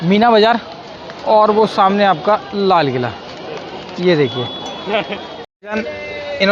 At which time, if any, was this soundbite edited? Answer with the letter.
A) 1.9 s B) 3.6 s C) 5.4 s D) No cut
C